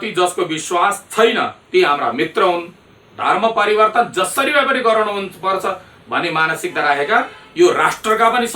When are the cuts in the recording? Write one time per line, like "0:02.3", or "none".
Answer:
none